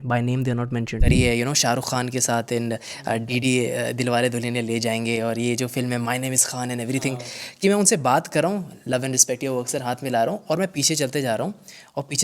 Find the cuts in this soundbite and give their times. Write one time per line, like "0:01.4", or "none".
0:01.1